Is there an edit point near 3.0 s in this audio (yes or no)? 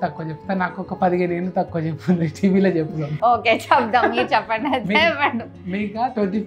yes